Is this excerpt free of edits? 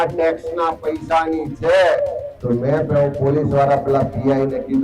no; 1 cut; at 2.3 s

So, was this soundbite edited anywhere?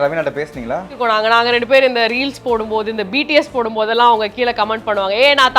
yes; 1 cut; at 0.9 s

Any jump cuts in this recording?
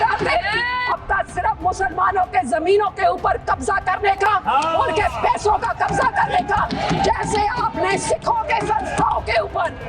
yes; 1 cut; at 0.9 s

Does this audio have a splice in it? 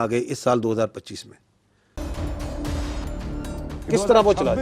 yes; 1 cut; at 2.0 s

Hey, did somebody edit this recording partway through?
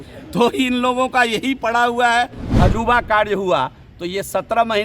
yes; 1 cut; at 2.4 s

